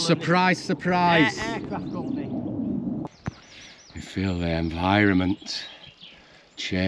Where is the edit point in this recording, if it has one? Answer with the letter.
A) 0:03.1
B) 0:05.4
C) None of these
A